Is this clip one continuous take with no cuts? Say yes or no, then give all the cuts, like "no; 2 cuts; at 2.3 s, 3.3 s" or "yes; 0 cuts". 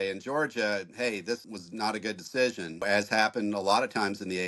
no; 2 cuts; at 1.6 s, 2.8 s